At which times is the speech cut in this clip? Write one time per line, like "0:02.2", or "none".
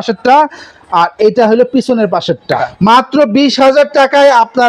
0:02.7